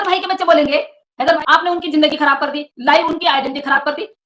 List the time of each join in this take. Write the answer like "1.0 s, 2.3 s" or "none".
1.4 s

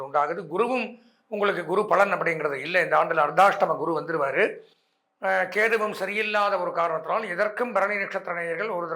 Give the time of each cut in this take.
none

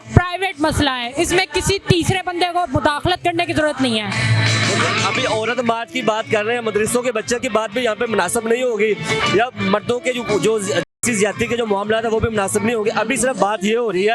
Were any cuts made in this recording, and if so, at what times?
none

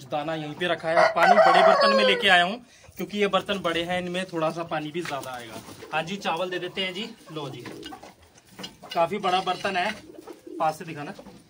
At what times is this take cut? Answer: none

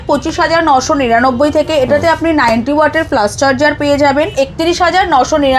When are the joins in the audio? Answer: 4.3 s

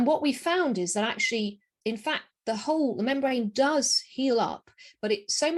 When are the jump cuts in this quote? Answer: none

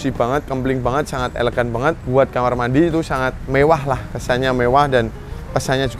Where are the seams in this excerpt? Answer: 2.0 s, 3.4 s

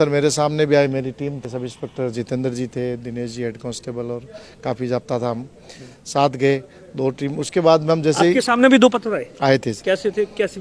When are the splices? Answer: 1.4 s

